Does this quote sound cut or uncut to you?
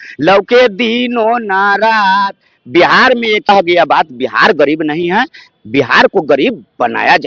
cut